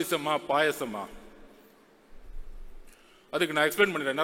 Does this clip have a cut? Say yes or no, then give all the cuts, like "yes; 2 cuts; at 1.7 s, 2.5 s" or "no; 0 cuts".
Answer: no; 0 cuts